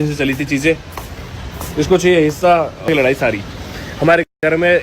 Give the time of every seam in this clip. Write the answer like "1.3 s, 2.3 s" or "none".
2.9 s